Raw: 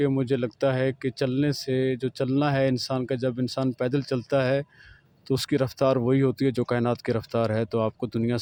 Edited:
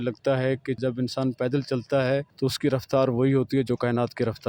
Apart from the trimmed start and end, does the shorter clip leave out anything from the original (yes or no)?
yes